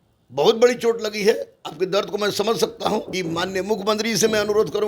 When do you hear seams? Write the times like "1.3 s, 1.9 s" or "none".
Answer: 3.1 s